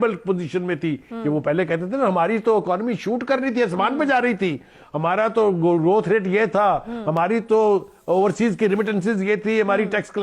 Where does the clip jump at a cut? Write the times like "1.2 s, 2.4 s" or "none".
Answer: 1.1 s